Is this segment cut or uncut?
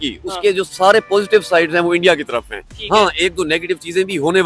uncut